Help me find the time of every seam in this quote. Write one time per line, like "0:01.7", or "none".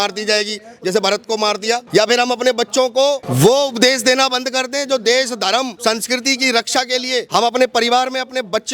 0:01.9
0:03.3
0:05.7
0:07.3